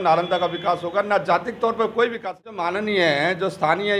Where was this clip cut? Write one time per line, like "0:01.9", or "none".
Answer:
0:02.7